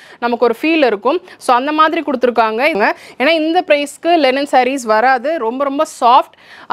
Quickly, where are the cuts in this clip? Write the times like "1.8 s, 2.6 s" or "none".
2.8 s